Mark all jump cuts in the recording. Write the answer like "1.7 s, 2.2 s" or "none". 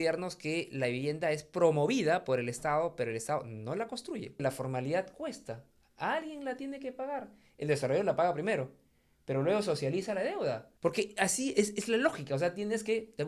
4.4 s, 10.7 s